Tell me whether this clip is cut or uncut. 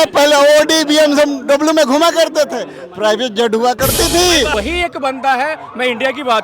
cut